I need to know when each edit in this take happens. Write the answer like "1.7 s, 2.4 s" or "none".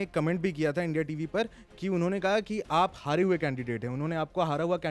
none